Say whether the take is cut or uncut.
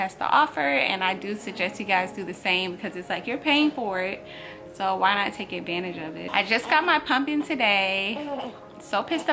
uncut